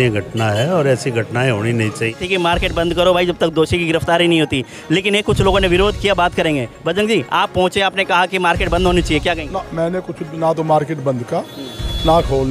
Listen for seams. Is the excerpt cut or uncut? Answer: cut